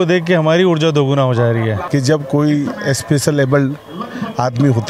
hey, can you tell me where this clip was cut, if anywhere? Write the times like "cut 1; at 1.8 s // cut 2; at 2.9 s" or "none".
cut 1; at 1.8 s